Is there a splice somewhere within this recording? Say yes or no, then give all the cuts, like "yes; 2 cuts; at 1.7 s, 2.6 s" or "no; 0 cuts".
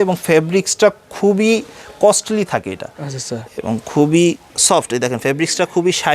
yes; 1 cut; at 4.5 s